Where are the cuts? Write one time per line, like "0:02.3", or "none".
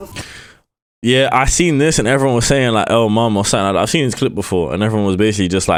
none